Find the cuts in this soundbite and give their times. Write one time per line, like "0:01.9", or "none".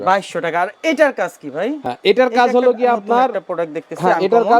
none